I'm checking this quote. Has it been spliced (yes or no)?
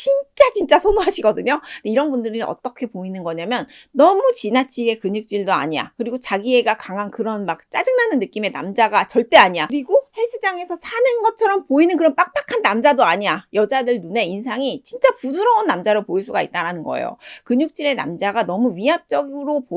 no